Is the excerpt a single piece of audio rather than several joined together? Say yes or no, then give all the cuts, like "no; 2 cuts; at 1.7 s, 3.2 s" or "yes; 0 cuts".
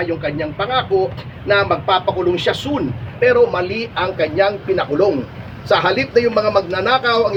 yes; 0 cuts